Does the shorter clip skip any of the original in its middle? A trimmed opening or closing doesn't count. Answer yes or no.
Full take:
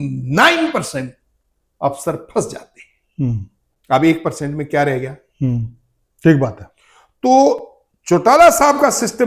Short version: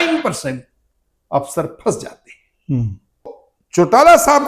yes